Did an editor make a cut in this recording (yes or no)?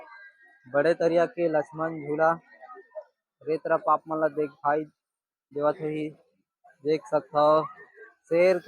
no